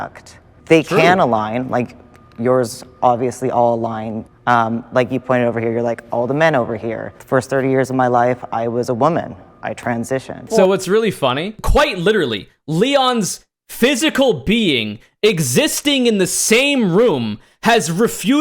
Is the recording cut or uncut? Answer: cut